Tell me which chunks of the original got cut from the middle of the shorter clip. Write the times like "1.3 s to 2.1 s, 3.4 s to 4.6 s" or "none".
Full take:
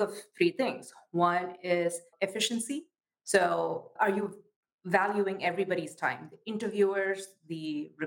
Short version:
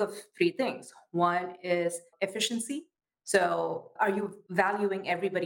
4.4 s to 4.7 s